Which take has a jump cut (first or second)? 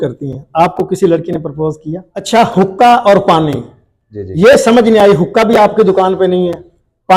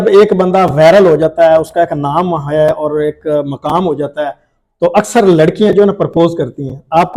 first